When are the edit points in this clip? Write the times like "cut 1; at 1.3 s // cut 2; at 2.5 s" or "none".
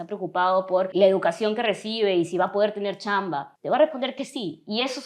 cut 1; at 0.9 s // cut 2; at 3.5 s